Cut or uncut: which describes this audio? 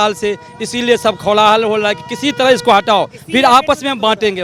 uncut